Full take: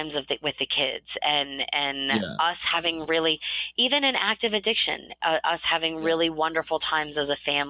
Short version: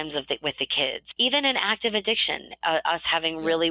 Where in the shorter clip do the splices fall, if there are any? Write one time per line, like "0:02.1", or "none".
0:01.0